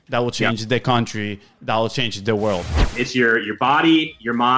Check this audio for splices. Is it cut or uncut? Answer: cut